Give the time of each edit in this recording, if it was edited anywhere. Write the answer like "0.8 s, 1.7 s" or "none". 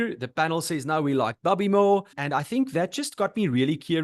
2.2 s

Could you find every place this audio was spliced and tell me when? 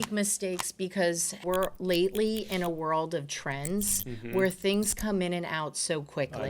1.4 s

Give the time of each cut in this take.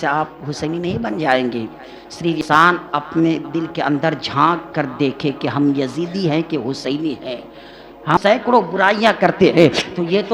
2.4 s, 8.4 s

